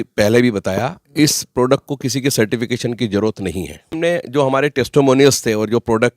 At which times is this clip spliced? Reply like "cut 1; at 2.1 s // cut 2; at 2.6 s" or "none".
cut 1; at 3.8 s